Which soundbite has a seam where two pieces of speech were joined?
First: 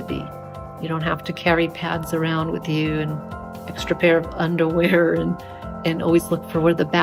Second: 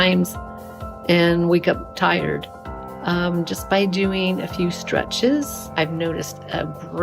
second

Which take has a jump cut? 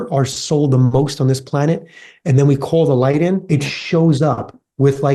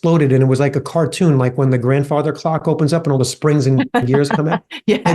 first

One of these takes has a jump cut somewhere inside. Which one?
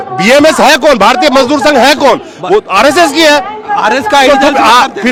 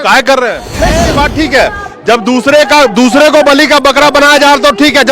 second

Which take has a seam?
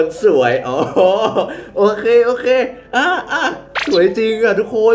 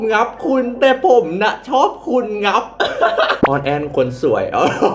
second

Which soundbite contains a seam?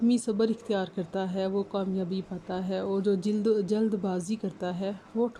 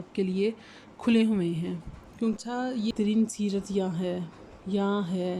second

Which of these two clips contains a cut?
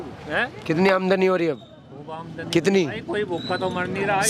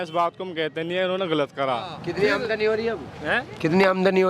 second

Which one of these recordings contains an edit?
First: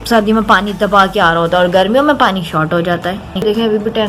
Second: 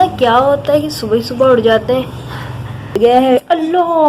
second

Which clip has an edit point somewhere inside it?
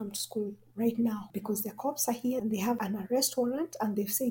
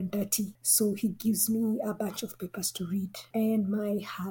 first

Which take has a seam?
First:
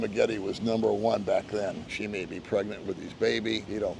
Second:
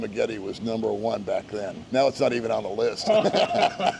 first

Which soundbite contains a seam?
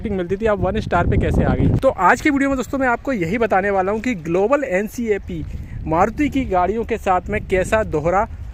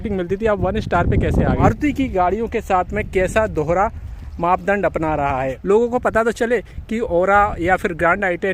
second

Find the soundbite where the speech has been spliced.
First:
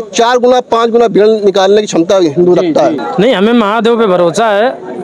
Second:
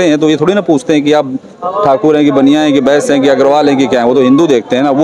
first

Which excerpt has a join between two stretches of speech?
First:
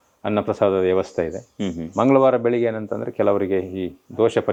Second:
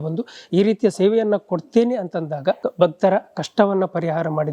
second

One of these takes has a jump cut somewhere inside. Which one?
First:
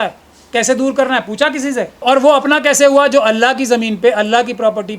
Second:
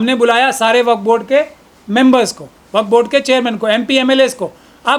first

